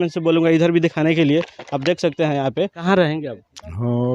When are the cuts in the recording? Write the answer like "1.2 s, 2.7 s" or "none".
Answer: 2.8 s